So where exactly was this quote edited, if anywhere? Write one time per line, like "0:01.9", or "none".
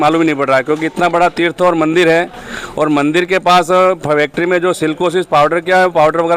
none